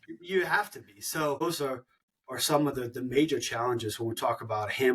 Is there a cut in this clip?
yes; 1 cut; at 1.4 s

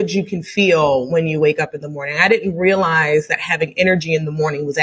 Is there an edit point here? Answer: no; 0 cuts

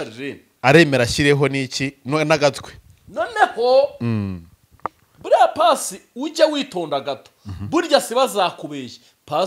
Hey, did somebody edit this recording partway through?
no; 0 cuts

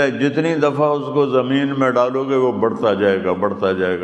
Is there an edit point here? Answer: no; 0 cuts

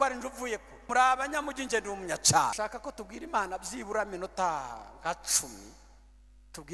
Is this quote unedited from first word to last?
no; 2 cuts; at 0.9 s, 2.5 s

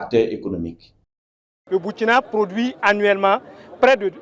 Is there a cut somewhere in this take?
yes; 1 cut; at 1.6 s

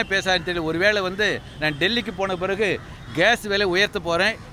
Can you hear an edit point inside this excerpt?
no; 0 cuts

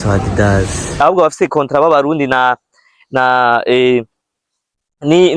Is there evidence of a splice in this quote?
yes; 1 cut; at 1.0 s

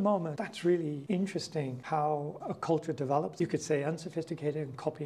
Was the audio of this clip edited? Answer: no; 0 cuts

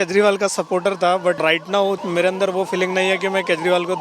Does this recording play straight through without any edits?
no; 1 cut; at 1.8 s

